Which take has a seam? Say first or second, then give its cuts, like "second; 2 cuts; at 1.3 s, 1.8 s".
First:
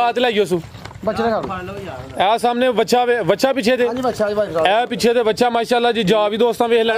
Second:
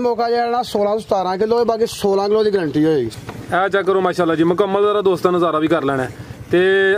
second; 1 cut; at 3.2 s